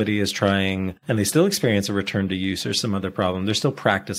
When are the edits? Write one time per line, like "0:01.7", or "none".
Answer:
0:01.0